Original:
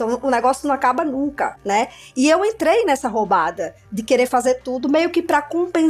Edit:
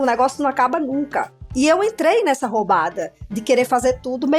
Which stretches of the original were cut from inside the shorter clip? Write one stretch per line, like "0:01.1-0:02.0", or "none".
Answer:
0:01.6-0:02.0